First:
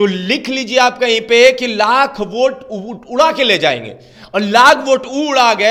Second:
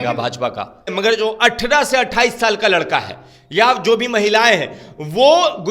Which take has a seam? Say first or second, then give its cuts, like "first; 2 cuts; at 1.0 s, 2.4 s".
second; 1 cut; at 0.9 s